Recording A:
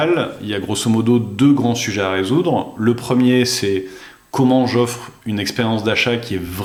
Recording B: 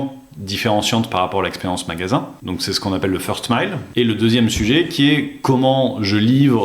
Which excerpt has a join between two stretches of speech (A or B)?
B